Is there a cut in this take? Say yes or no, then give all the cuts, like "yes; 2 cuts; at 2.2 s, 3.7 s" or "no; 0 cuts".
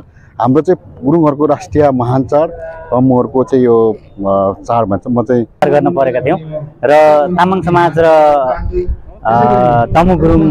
yes; 1 cut; at 5.6 s